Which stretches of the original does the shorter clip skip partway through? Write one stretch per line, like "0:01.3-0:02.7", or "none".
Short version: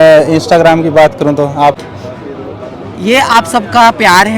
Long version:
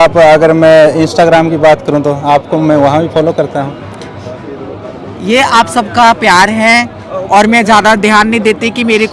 0:02.5-0:04.0